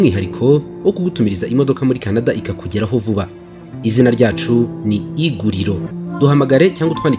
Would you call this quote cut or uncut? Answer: cut